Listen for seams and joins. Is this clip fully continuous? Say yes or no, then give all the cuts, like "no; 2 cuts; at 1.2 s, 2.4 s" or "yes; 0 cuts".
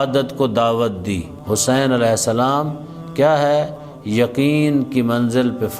no; 1 cut; at 1.3 s